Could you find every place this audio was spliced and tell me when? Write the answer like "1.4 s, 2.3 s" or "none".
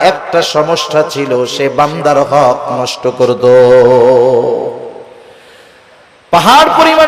none